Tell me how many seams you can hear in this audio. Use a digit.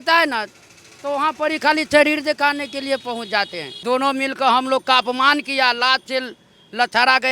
1